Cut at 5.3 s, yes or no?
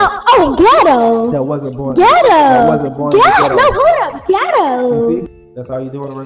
yes